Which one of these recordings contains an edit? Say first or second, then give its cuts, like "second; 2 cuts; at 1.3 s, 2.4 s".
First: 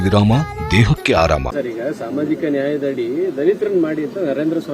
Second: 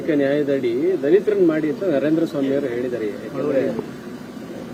first; 1 cut; at 1.4 s